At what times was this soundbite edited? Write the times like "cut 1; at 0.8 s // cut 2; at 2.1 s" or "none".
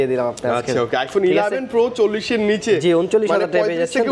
none